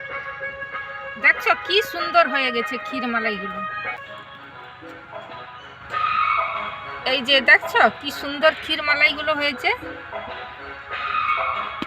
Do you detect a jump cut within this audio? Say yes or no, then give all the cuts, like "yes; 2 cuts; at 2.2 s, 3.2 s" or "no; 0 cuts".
yes; 1 cut; at 4.0 s